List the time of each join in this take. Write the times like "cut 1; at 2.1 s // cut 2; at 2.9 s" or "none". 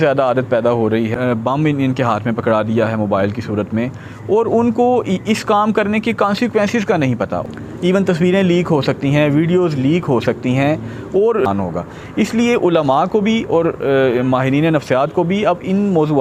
cut 1; at 1.1 s // cut 2; at 7.4 s // cut 3; at 11.5 s